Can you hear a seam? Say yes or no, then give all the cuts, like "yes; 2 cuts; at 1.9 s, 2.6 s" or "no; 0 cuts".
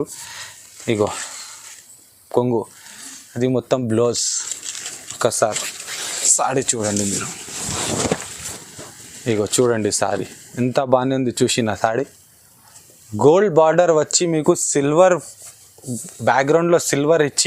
no; 0 cuts